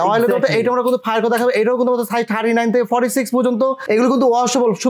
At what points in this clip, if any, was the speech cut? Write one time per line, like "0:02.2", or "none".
0:03.8